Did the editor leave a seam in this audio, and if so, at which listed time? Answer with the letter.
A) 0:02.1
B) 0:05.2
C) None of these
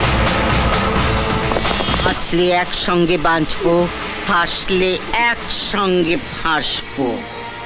A